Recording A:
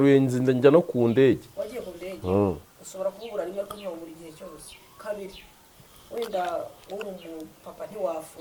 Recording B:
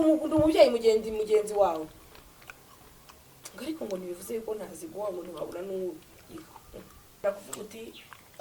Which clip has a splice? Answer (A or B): B